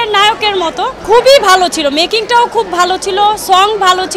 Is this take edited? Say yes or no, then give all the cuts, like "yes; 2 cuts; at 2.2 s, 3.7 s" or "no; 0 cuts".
yes; 1 cut; at 1.0 s